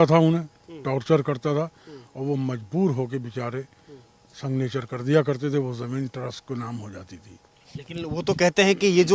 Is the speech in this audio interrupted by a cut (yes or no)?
no